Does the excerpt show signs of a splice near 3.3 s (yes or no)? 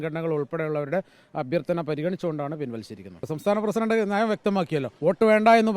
yes